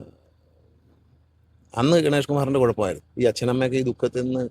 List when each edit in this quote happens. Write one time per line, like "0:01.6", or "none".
0:03.0